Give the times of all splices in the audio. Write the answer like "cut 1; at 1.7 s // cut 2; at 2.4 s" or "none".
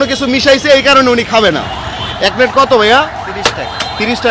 cut 1; at 1.6 s